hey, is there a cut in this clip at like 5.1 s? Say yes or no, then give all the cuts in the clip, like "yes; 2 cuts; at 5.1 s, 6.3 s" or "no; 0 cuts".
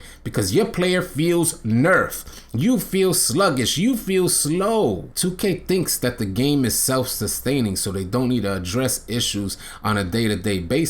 yes; 1 cut; at 5.1 s